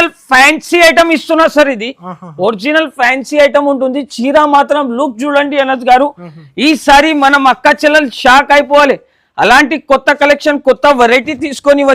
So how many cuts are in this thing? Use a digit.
0